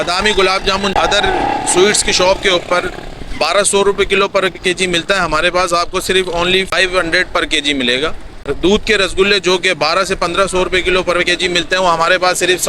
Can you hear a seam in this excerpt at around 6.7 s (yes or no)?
yes